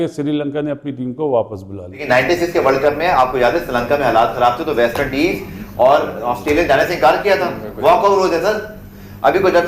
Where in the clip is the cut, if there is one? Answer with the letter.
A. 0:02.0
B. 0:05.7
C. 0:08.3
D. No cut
A